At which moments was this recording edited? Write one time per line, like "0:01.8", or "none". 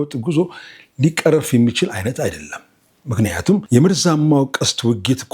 0:03.6

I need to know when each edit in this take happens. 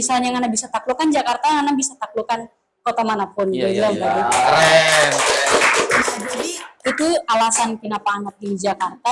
none

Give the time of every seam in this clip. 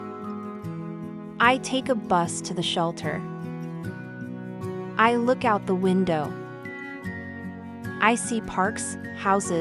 none

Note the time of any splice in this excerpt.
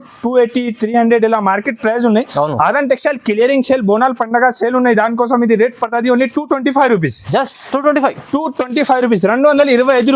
none

